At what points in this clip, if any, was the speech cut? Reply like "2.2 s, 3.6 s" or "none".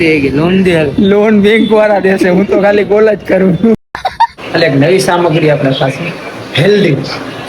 4.3 s